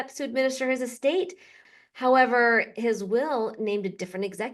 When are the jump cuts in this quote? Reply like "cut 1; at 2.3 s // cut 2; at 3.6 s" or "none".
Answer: cut 1; at 1.6 s